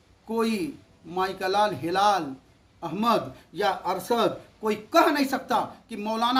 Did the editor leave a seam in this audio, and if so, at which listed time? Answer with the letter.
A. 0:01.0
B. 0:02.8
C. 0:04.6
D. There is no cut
D